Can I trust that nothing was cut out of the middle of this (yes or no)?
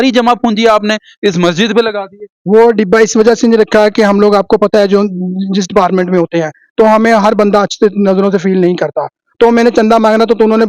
yes